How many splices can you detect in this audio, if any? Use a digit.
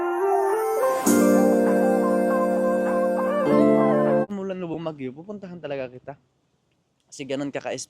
1